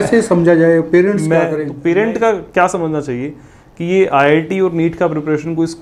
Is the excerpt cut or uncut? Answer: cut